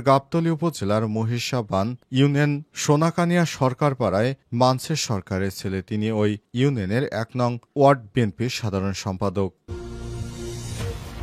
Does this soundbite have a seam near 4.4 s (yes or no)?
no